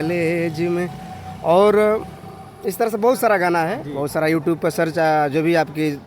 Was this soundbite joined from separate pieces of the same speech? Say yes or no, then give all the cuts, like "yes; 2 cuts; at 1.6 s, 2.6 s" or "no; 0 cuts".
no; 0 cuts